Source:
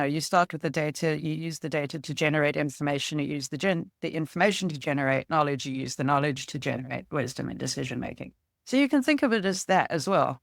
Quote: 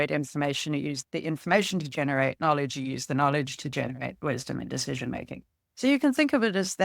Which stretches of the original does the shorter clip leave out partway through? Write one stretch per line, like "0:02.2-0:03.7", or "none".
0:03.5-0:03.9